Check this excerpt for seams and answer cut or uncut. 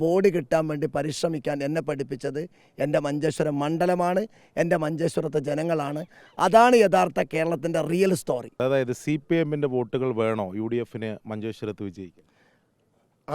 cut